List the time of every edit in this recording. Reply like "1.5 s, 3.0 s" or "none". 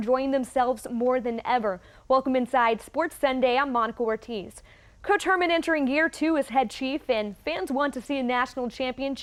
none